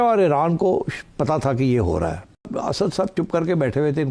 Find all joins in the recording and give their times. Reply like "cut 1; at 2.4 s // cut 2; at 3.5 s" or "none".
cut 1; at 2.4 s